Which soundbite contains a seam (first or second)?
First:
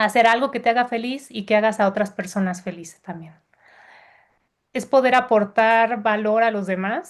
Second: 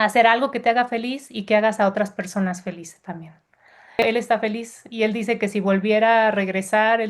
second